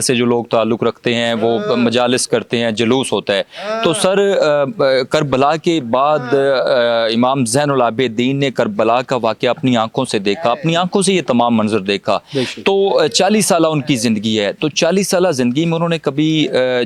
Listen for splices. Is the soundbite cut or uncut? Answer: uncut